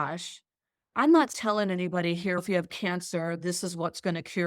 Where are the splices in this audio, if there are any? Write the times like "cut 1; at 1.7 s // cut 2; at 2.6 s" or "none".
cut 1; at 1.0 s // cut 2; at 2.4 s